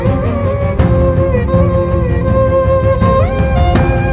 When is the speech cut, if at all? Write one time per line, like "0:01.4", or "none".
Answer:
none